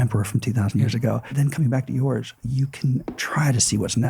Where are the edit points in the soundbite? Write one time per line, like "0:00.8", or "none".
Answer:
0:01.3
0:02.4
0:03.2